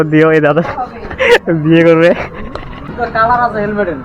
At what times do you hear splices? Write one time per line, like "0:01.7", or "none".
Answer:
0:02.8